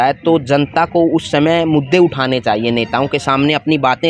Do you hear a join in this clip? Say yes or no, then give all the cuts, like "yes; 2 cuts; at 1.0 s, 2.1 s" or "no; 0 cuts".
no; 0 cuts